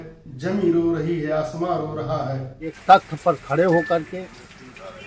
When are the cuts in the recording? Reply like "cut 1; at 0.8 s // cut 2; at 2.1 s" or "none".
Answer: cut 1; at 2.8 s

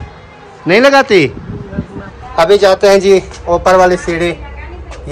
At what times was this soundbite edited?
cut 1; at 2.3 s

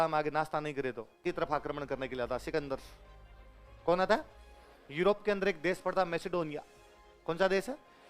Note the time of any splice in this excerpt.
cut 1; at 1.2 s

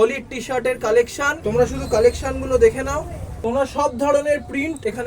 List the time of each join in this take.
cut 1; at 1.4 s

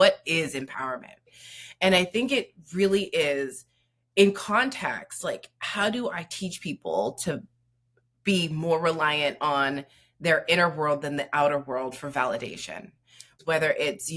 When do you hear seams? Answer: cut 1; at 1.3 s // cut 2; at 13.3 s

